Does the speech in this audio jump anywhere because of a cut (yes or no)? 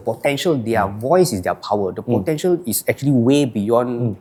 no